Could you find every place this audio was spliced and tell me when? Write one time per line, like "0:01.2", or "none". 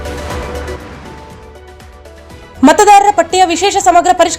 0:02.0